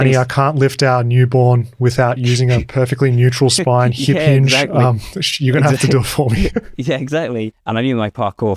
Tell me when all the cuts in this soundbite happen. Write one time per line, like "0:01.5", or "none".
0:07.6